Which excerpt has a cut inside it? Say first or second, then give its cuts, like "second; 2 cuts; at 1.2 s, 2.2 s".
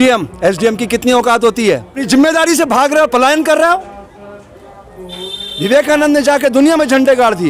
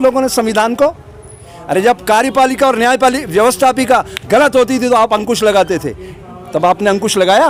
first; 1 cut; at 1.9 s